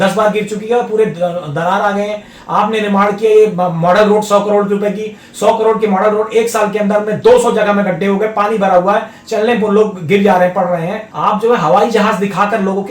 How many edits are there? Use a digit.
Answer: 1